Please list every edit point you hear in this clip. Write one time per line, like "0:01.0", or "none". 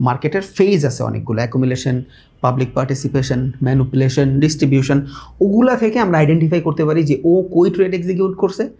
none